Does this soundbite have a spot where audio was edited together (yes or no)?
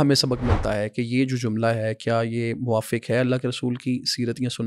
no